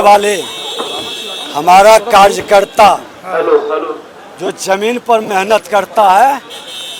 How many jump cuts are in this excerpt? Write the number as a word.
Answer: zero